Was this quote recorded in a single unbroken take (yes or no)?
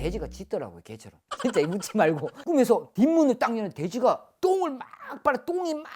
yes